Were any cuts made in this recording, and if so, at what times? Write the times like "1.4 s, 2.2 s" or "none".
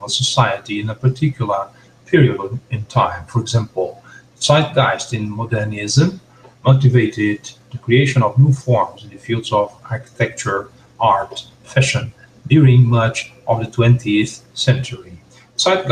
7.1 s